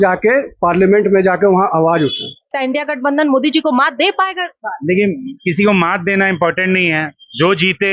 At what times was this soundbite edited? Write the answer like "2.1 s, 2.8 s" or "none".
2.6 s